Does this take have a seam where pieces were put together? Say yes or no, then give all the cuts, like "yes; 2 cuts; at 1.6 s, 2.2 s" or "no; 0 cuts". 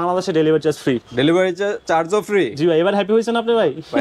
no; 0 cuts